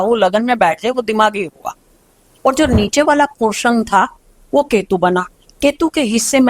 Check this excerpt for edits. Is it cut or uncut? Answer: uncut